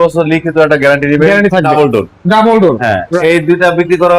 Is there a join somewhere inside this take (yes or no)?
yes